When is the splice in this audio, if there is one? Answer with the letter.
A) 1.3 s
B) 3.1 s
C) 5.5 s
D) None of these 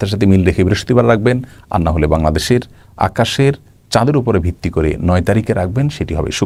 D